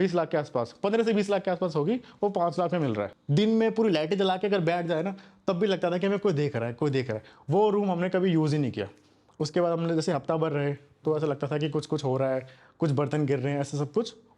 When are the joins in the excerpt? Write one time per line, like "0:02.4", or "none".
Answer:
0:03.1